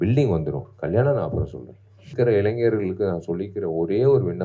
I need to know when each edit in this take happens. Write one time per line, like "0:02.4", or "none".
0:02.1

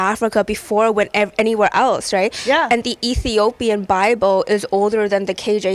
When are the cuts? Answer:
none

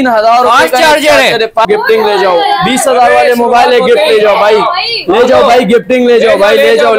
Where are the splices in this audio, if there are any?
0:01.6

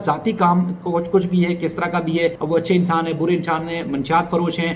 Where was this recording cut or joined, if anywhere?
0:02.4

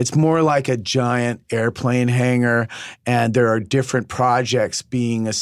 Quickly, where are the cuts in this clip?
none

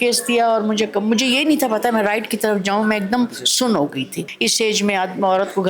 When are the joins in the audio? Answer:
0:04.2

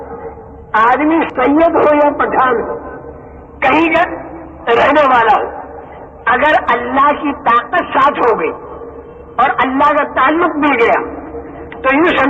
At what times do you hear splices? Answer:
0:01.3

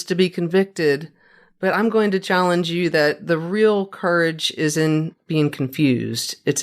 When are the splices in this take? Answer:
0:05.2

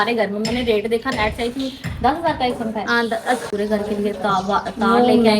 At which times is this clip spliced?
0:03.5

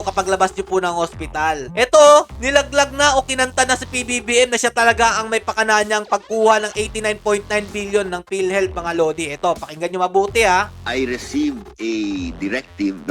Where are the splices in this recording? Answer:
0:01.7
0:10.8

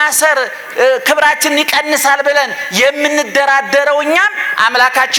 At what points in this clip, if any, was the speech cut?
none

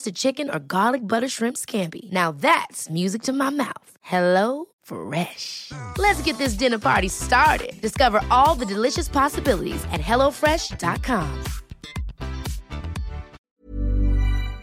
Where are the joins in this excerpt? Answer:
0:13.4

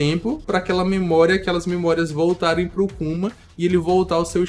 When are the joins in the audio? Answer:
none

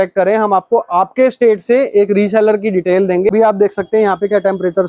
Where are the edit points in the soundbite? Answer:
0:03.3

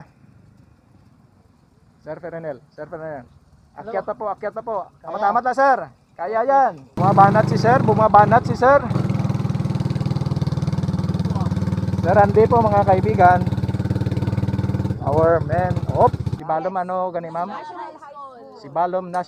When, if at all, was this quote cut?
0:06.9
0:16.3

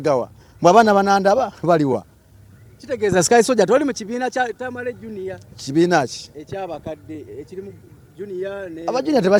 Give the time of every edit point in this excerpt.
none

